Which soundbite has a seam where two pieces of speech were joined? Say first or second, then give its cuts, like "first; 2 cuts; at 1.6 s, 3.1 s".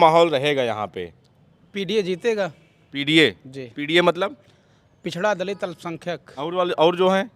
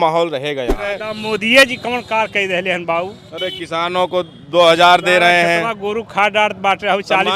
second; 1 cut; at 1.1 s